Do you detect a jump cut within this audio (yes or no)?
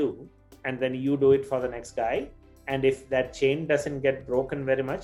no